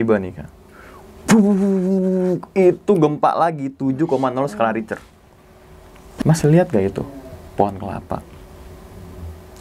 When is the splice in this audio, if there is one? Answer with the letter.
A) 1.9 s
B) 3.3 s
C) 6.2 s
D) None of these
C